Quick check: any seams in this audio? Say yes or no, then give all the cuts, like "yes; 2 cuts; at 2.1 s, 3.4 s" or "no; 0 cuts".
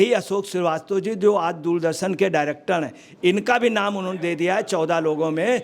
no; 0 cuts